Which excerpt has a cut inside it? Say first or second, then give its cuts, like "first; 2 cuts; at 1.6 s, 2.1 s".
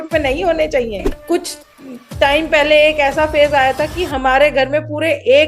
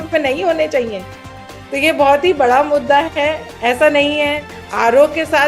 first; 1 cut; at 1.1 s